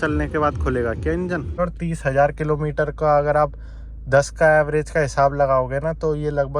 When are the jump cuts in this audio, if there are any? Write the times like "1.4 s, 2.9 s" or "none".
1.6 s